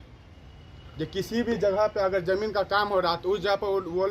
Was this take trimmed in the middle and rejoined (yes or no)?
no